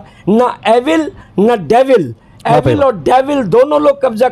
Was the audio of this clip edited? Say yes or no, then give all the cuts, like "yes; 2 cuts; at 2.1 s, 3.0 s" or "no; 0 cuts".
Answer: no; 0 cuts